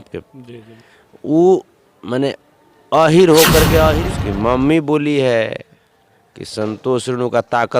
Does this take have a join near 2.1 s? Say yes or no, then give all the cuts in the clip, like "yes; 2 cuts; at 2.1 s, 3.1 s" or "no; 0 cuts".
no; 1 cut; at 3.9 s